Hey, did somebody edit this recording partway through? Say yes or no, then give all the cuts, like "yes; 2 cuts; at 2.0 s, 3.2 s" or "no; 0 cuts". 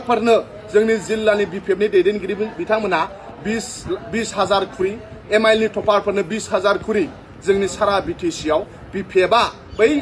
no; 0 cuts